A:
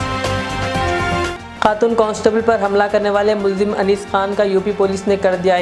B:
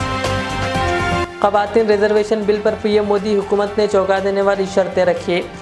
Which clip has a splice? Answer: A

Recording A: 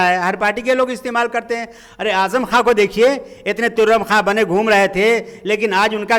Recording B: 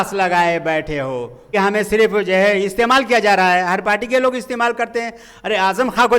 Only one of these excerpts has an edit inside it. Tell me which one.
B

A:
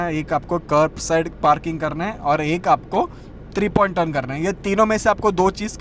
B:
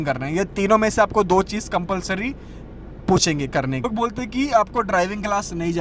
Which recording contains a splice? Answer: B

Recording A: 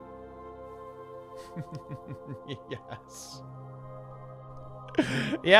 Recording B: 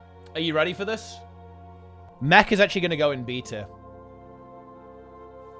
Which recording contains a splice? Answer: B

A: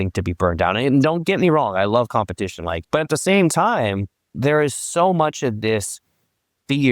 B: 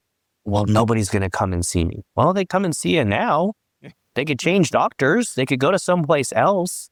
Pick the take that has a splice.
A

